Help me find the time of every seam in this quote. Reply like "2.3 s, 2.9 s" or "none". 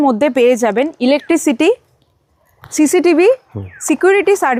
none